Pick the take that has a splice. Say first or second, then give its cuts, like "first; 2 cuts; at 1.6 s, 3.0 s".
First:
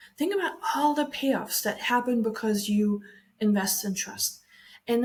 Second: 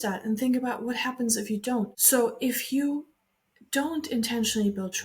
second; 1 cut; at 2.0 s